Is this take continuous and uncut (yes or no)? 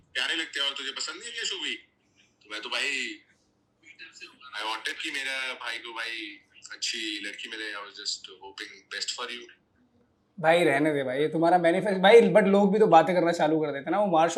yes